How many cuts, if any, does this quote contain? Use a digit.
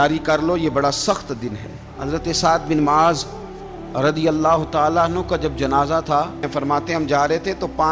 2